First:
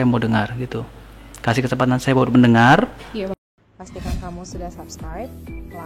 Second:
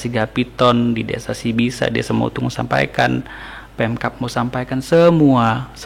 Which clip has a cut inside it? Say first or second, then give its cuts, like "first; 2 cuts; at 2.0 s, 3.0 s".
first; 1 cut; at 3.4 s